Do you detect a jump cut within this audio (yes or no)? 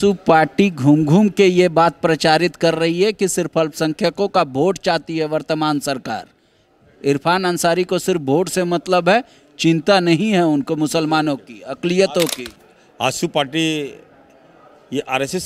no